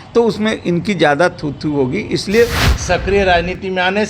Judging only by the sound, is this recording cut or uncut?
cut